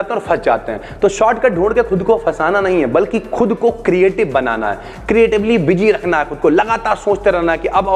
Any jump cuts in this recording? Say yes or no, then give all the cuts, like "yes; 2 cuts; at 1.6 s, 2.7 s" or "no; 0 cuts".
no; 0 cuts